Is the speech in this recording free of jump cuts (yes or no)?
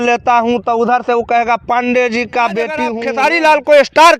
no